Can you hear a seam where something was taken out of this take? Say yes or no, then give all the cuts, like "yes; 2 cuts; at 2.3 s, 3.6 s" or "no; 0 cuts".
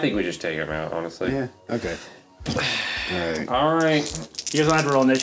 no; 0 cuts